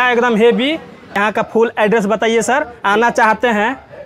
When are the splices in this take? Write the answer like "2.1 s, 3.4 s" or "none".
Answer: 1.2 s

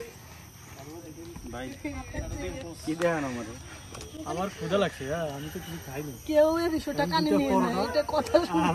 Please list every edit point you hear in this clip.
none

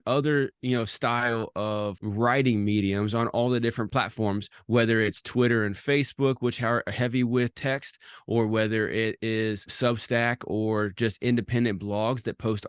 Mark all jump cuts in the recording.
2.0 s, 3.9 s, 9.7 s

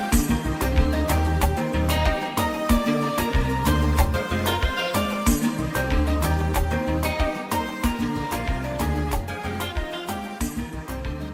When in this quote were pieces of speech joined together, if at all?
9.7 s

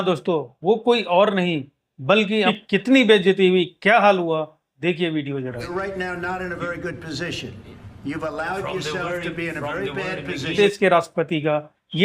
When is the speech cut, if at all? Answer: 2.5 s, 10.5 s

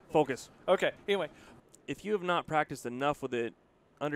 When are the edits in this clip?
1.4 s

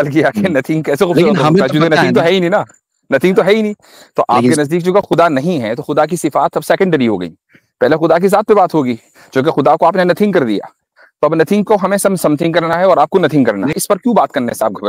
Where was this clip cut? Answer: 13.7 s

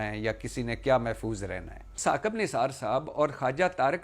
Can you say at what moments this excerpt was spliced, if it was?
2.0 s

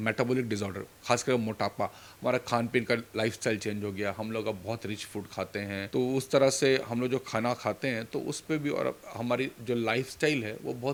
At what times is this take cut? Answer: none

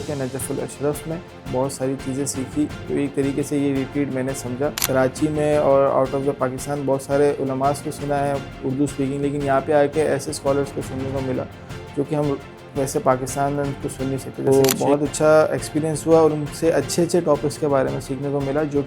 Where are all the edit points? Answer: 1.3 s, 4.8 s, 14.5 s

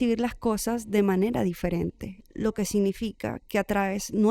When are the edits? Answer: none

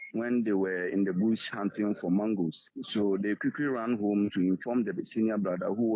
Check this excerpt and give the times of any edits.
none

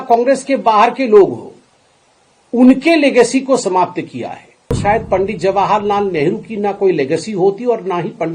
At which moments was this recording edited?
4.8 s

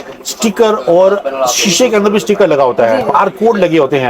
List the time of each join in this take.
3.1 s

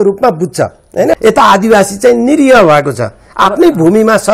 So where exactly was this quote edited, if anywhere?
1.1 s

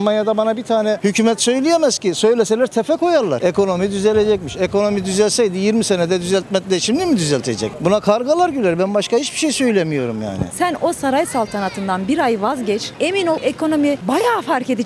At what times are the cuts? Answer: 3.4 s, 10.5 s, 13.4 s

